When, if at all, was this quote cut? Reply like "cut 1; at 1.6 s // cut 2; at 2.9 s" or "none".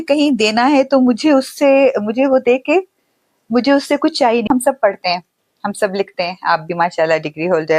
cut 1; at 4.5 s